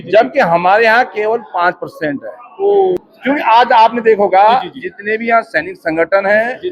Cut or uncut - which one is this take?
cut